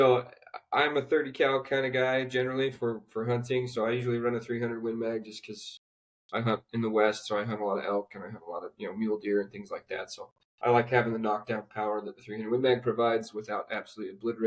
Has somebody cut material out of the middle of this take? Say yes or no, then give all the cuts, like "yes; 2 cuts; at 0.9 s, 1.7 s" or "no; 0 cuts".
no; 0 cuts